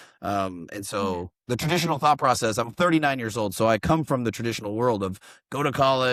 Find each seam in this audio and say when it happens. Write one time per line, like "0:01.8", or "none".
none